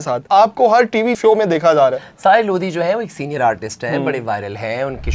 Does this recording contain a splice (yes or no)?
no